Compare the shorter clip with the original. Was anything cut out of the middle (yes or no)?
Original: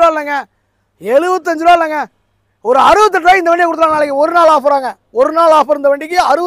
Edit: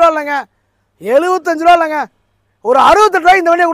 no